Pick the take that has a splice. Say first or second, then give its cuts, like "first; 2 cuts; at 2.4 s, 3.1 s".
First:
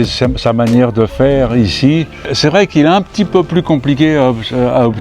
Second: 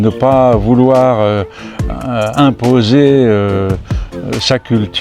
first; 1 cut; at 2.2 s